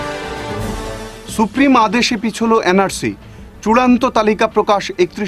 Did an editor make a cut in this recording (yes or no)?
no